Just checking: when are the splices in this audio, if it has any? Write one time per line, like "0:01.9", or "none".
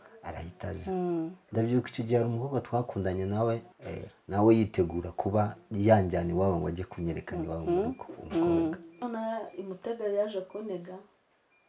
0:09.0